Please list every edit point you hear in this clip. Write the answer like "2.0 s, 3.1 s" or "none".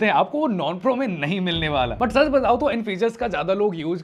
none